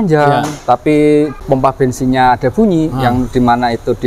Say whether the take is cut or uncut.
cut